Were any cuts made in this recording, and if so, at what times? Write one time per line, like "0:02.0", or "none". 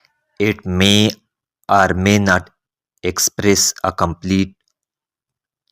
none